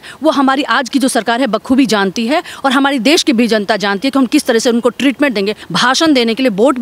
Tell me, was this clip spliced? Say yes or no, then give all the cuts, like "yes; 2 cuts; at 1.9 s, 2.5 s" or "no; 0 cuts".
yes; 1 cut; at 5.6 s